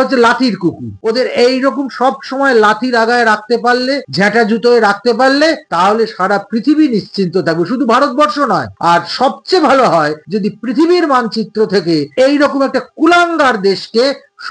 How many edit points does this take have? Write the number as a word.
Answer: zero